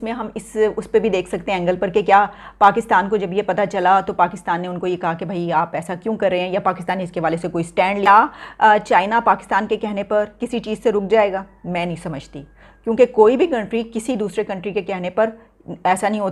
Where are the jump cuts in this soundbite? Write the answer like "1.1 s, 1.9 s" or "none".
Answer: none